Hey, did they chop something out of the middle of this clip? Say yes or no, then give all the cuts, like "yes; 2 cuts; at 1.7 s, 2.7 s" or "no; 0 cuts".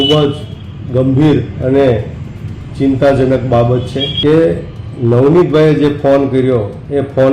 yes; 1 cut; at 4.1 s